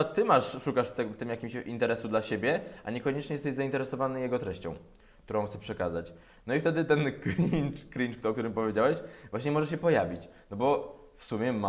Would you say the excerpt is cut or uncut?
uncut